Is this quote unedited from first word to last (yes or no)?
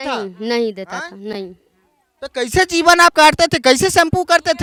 yes